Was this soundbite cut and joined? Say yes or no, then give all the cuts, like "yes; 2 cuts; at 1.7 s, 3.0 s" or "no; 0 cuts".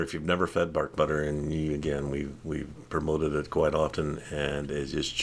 no; 0 cuts